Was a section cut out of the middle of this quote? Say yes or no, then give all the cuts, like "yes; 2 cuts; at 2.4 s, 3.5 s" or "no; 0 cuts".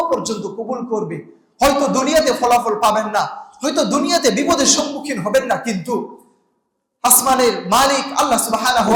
no; 0 cuts